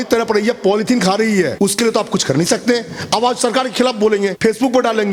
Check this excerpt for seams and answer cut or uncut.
uncut